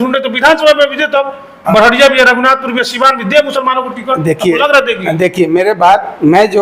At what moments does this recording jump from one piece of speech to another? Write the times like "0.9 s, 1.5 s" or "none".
none

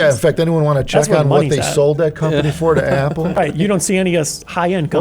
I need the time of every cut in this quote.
3.4 s

